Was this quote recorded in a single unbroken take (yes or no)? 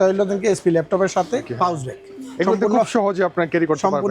no